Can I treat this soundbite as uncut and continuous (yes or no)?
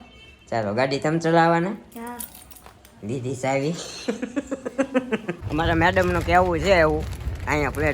no